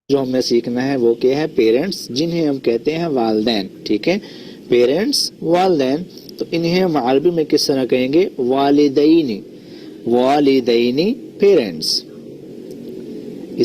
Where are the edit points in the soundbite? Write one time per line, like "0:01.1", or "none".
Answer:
0:01.2